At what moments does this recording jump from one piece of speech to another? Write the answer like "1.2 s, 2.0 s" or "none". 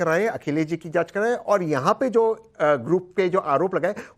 1.6 s